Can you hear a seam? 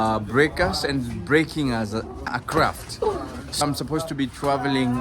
yes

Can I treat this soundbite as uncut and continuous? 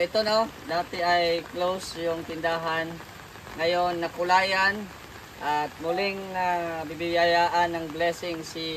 yes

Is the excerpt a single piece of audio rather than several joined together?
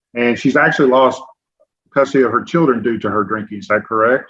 yes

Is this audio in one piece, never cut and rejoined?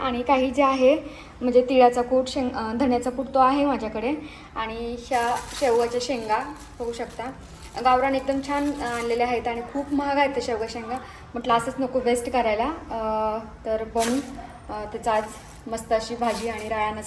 yes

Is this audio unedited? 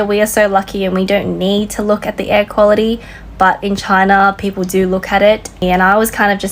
no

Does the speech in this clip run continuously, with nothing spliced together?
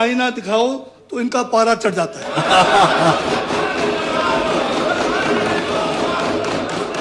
yes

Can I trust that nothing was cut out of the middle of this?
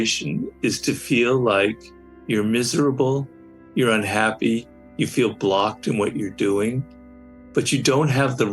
yes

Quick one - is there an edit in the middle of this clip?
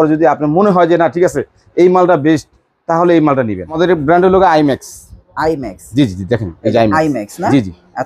yes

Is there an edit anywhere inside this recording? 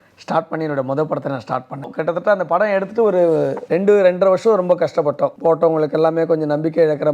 yes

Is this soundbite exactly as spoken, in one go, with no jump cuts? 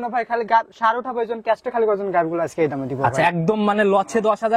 yes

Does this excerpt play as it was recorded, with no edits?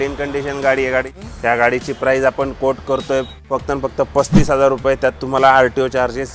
no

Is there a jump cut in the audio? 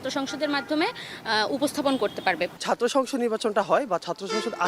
no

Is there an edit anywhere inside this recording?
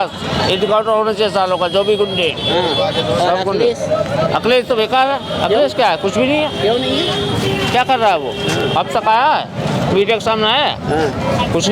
no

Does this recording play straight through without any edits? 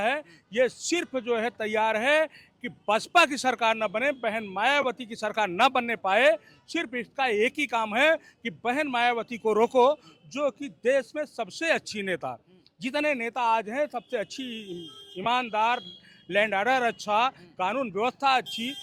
yes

